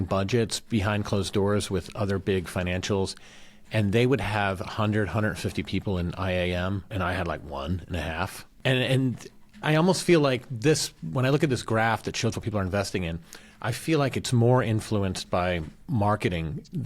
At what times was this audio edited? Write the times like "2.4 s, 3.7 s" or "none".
6.9 s, 8.4 s, 9.5 s